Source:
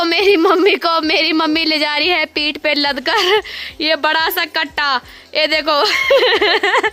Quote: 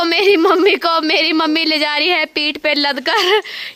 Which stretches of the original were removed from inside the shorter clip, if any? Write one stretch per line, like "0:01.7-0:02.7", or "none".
none